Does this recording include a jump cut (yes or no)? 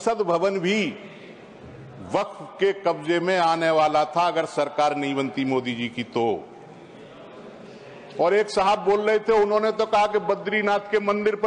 no